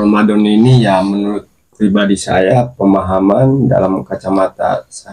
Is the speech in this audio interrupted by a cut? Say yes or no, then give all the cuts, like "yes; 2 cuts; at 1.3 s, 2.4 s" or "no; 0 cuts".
no; 0 cuts